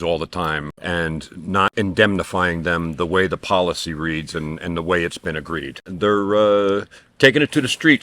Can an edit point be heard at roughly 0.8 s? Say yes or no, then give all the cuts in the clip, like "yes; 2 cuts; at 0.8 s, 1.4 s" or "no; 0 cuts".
yes; 3 cuts; at 0.8 s, 1.7 s, 5.8 s